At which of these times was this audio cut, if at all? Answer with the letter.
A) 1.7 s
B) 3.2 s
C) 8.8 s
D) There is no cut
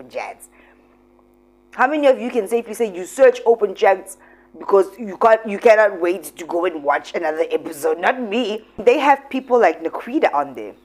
C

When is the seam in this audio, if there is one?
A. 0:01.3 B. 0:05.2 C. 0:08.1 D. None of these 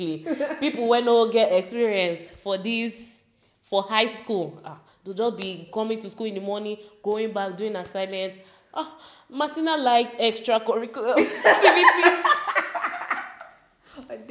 D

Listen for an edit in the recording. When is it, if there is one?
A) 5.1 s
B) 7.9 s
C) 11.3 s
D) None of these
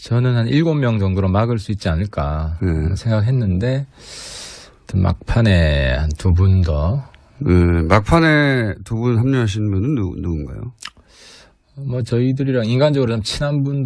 D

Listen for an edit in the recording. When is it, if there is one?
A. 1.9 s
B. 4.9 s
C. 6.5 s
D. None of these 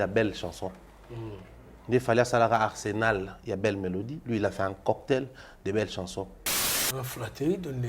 C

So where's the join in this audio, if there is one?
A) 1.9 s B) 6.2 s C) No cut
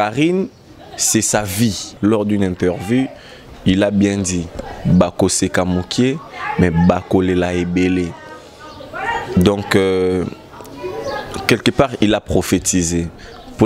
A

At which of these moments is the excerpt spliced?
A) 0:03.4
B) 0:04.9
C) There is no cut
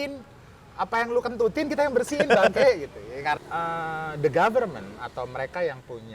A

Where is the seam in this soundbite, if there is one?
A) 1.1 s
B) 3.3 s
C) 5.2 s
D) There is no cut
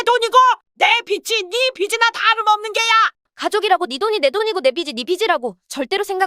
B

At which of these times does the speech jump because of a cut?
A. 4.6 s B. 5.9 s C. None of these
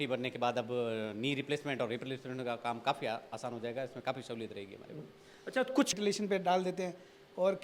B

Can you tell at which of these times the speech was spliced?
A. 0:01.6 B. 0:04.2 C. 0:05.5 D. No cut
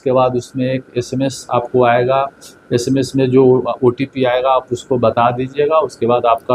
D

